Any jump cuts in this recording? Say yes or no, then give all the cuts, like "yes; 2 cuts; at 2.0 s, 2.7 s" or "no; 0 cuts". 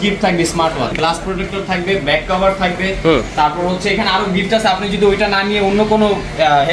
yes; 1 cut; at 0.9 s